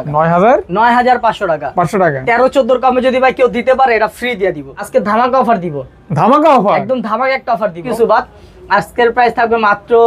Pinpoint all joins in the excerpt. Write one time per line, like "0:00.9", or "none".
0:04.7
0:07.8